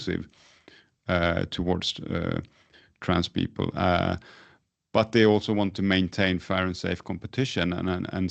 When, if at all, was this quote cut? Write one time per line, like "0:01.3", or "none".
none